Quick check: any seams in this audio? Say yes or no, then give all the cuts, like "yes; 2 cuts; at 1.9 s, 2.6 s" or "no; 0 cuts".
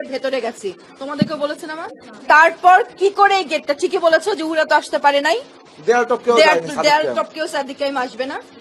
no; 0 cuts